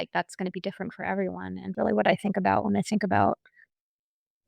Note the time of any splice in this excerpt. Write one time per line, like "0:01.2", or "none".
0:01.7